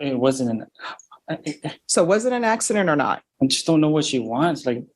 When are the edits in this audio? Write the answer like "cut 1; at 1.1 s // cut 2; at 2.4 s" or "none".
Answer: cut 1; at 3.3 s